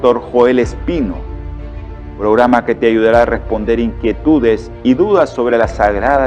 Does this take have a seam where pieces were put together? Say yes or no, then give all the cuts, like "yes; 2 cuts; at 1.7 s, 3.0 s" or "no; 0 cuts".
no; 0 cuts